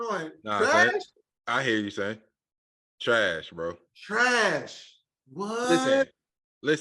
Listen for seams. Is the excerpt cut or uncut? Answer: cut